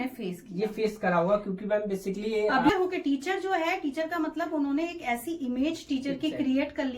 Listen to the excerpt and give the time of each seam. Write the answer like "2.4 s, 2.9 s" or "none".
2.7 s